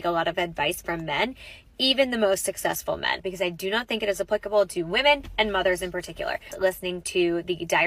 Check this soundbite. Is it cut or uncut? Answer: cut